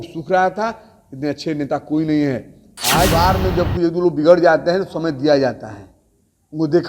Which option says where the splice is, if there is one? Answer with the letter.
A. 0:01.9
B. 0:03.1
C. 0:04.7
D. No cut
B